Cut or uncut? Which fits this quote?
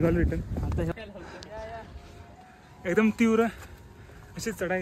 cut